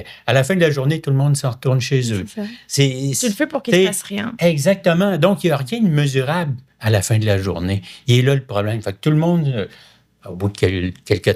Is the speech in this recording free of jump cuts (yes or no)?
yes